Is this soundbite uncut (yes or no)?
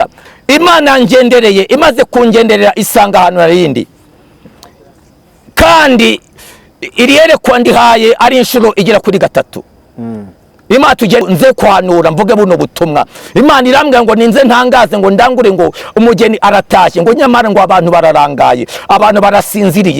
no